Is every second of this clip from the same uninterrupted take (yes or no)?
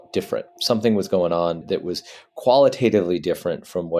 no